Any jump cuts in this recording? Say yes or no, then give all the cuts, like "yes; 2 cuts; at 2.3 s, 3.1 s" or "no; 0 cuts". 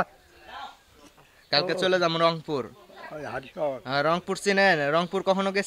no; 0 cuts